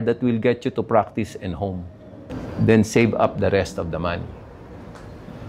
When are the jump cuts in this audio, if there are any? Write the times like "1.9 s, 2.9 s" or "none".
2.3 s